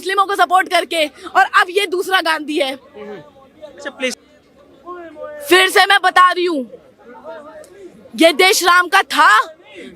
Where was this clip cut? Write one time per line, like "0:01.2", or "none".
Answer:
0:04.2